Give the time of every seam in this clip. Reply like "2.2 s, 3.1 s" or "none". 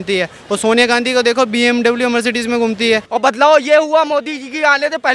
3.0 s